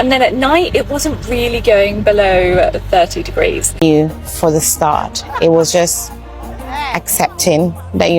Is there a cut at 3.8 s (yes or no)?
yes